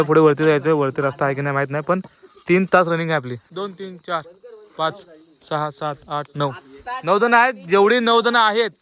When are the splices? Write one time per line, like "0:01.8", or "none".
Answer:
0:03.4